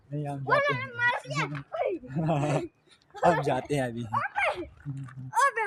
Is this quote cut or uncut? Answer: uncut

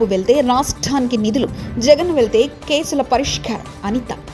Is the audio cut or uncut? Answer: uncut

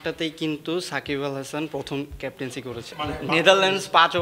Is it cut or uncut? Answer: cut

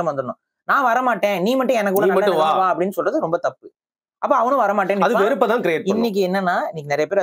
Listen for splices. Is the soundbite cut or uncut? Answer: uncut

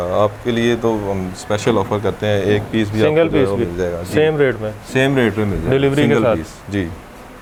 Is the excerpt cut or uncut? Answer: uncut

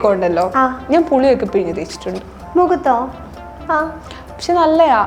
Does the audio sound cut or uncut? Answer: uncut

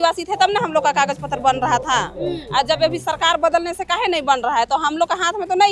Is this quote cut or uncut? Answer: uncut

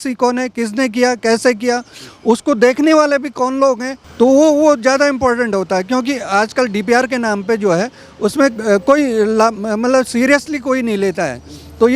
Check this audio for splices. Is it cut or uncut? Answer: cut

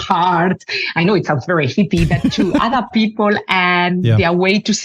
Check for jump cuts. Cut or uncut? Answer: uncut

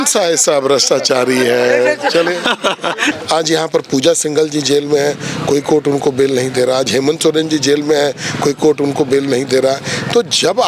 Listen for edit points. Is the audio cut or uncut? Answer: cut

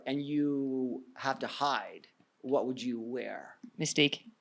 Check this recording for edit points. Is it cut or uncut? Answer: uncut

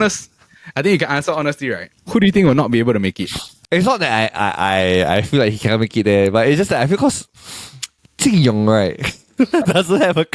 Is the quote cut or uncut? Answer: cut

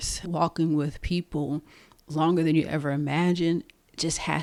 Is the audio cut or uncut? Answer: uncut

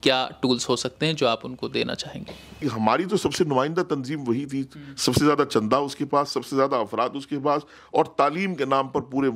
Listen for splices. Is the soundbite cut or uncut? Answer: cut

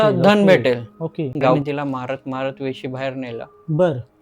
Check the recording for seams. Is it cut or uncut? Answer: cut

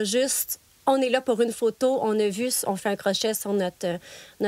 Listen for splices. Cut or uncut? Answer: uncut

